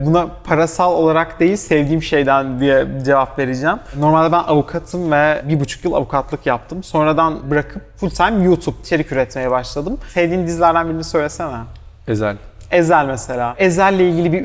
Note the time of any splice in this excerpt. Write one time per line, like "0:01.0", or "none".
0:04.0
0:05.4
0:07.4
0:08.9
0:10.1
0:13.5